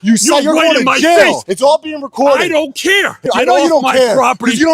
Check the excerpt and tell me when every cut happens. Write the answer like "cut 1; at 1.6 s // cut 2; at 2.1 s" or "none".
cut 1; at 1.5 s // cut 2; at 3.2 s